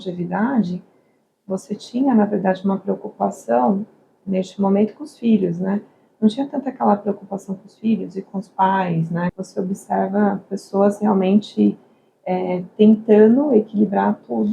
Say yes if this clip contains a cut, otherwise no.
yes